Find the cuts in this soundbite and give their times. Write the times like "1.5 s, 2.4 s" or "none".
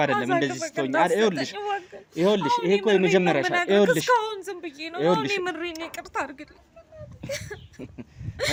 none